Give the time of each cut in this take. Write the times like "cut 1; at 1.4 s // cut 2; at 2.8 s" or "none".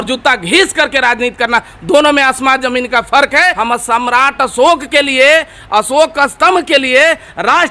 cut 1; at 3.6 s